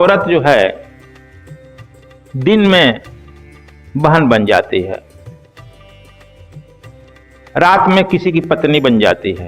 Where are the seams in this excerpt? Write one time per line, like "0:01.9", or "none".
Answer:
0:00.9
0:02.3
0:05.0
0:07.2